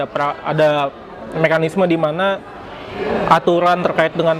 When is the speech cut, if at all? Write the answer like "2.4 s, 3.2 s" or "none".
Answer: none